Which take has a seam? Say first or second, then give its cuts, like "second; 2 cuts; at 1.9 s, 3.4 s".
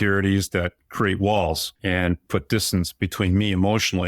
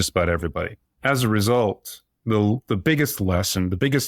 first; 1 cut; at 1.7 s